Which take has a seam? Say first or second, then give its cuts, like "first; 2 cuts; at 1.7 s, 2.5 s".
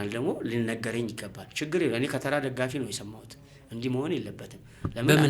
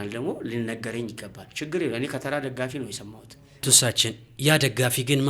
second; 1 cut; at 3.5 s